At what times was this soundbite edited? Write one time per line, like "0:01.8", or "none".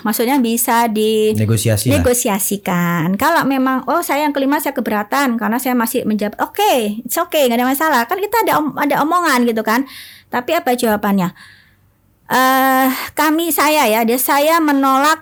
none